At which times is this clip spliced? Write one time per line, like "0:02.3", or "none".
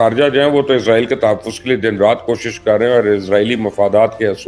none